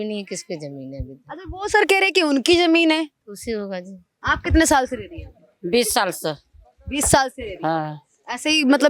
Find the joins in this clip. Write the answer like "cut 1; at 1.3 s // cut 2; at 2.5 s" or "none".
cut 1; at 4.1 s